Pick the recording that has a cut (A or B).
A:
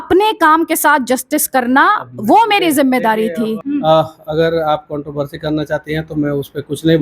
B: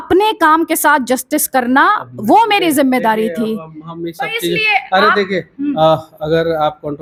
A